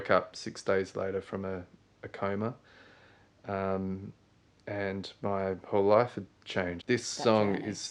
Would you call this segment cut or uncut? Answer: cut